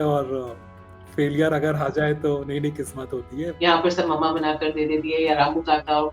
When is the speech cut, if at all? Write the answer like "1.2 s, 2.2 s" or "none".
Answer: 3.5 s, 5.3 s